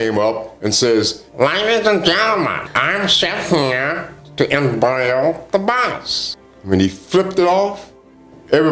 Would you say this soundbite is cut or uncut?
cut